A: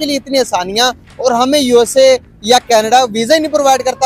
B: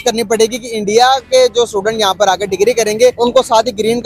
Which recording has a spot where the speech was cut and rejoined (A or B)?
B